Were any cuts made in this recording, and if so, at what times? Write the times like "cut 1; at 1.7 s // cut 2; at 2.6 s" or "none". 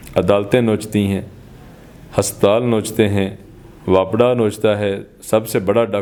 none

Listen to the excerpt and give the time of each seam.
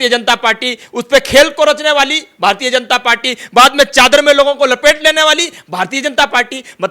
none

